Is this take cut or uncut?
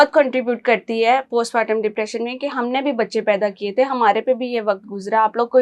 uncut